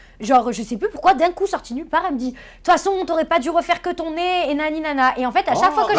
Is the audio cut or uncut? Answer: uncut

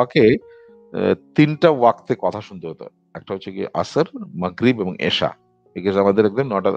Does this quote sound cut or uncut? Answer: uncut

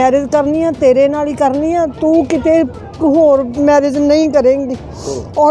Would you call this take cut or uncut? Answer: uncut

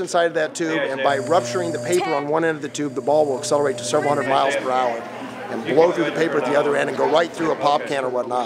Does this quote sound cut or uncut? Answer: cut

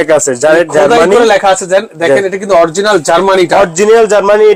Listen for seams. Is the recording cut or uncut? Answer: uncut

